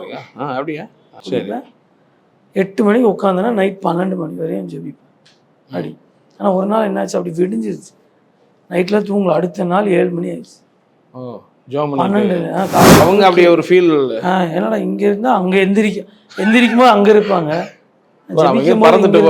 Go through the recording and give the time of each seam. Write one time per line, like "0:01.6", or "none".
0:01.1
0:13.0